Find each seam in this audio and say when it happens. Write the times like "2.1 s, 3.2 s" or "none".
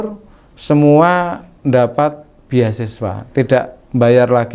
none